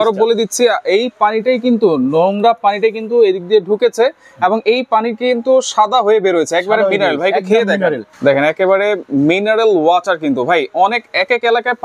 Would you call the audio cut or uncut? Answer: uncut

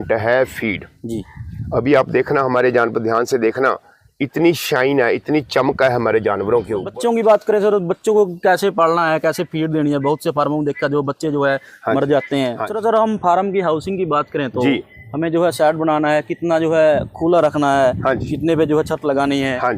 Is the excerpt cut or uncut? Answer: cut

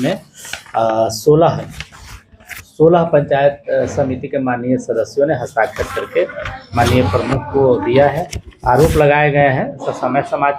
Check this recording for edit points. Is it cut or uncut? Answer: cut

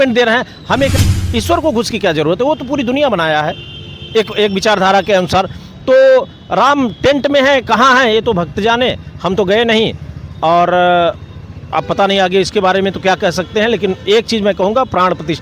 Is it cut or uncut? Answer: cut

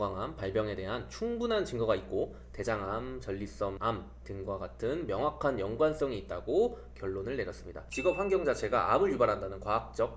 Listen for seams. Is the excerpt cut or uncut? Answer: cut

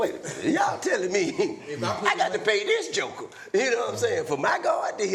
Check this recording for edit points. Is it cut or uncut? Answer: uncut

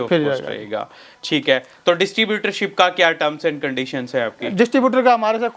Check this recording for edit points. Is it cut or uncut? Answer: uncut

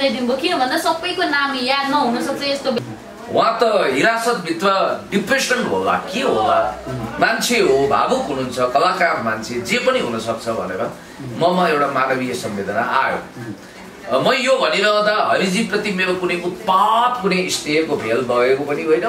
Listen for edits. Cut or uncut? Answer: cut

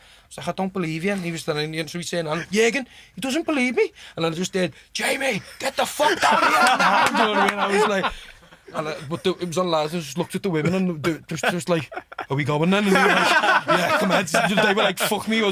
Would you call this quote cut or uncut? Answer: uncut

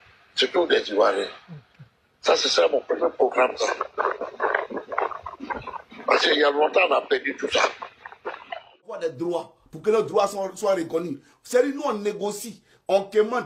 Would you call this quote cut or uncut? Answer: cut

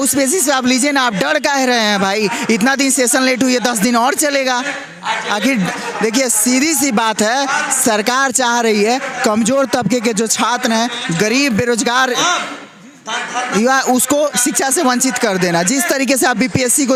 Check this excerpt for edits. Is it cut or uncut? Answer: uncut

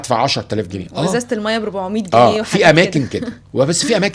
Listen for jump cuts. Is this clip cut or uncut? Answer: uncut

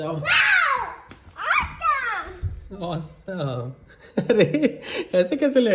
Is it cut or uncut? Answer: uncut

